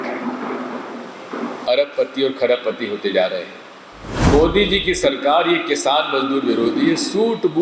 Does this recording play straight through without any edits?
no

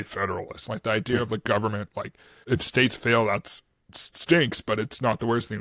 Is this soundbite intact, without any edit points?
no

